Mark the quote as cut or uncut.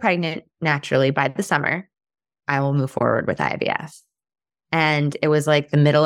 uncut